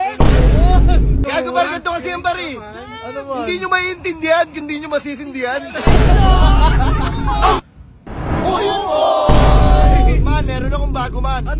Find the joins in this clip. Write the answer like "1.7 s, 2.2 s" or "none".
1.2 s, 7.7 s